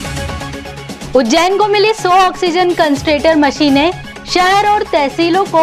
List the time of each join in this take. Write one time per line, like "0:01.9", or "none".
none